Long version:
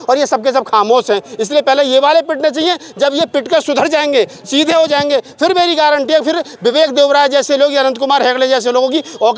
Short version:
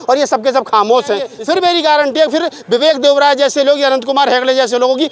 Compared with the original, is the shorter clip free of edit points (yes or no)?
no